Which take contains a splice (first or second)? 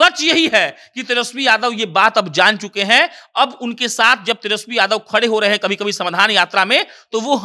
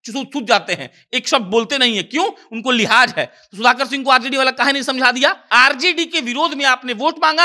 second